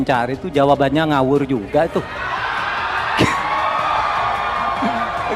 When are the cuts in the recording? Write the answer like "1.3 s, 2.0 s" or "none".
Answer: none

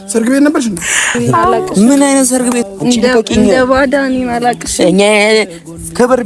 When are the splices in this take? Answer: 2.6 s

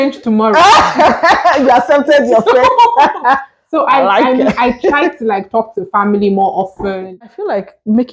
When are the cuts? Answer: 7.2 s

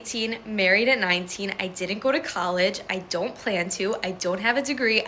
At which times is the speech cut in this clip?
1.4 s

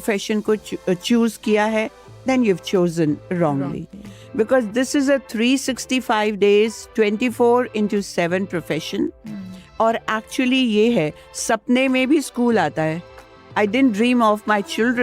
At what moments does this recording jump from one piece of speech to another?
13.2 s

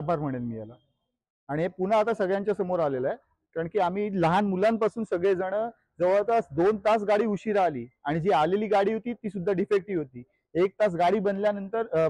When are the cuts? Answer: none

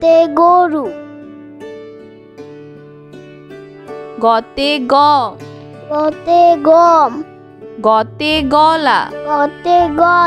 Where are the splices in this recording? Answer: 1.4 s, 4.2 s

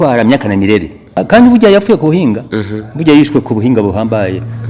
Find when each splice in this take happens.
1.1 s

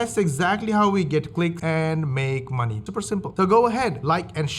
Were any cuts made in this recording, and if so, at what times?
3.3 s

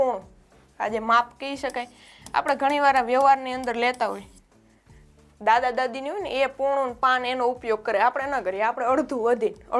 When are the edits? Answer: none

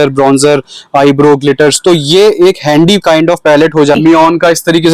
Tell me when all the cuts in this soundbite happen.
4.0 s

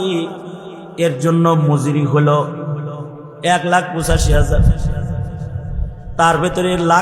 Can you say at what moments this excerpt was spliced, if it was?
none

